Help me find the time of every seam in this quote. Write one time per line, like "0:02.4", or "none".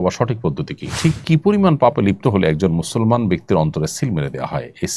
0:01.0